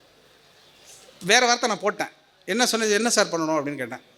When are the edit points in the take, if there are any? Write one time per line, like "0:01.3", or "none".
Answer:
none